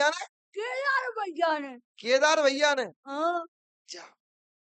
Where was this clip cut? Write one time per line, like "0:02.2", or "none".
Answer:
none